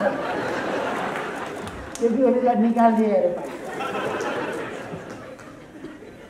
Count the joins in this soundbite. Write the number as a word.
zero